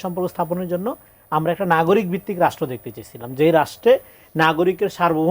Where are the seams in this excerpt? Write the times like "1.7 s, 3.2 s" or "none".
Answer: none